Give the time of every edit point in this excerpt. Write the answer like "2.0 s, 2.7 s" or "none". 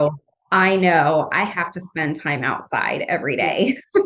none